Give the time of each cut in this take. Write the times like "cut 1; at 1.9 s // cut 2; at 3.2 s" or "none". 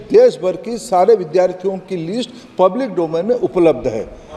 none